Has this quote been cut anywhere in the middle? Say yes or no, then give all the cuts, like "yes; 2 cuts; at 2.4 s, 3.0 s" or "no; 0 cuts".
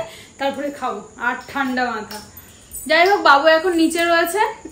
no; 0 cuts